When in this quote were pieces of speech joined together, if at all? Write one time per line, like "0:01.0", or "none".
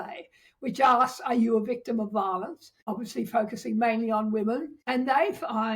0:02.7
0:04.8